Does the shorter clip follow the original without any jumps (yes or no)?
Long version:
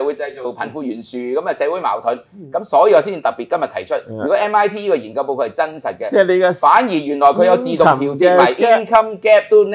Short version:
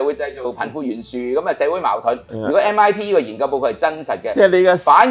no